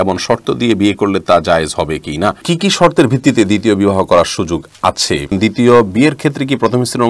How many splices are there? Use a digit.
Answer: 2